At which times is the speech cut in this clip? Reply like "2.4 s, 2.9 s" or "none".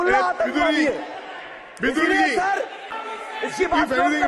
3.1 s